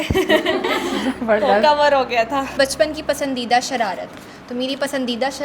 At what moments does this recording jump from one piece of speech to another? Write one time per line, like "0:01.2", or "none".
0:02.6